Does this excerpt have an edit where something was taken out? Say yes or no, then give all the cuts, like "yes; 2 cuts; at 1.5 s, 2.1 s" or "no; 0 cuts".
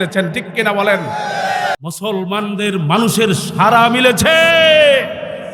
yes; 1 cut; at 1.8 s